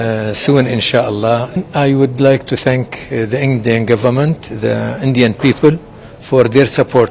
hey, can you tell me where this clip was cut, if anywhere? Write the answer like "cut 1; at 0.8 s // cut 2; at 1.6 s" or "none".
cut 1; at 1.6 s